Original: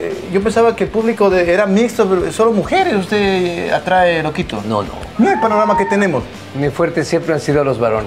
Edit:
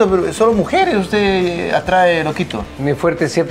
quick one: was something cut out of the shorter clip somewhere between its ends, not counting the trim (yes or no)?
yes